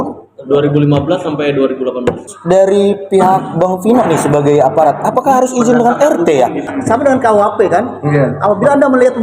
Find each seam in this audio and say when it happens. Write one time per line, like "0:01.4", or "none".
0:02.3
0:06.8